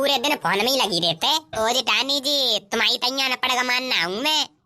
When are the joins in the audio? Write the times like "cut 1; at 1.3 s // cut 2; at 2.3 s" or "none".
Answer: cut 1; at 1.5 s